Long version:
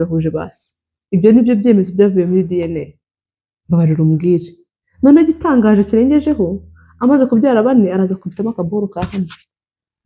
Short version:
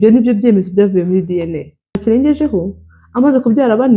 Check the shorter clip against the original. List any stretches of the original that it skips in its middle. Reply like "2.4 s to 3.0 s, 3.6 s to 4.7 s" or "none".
3.2 s to 5.9 s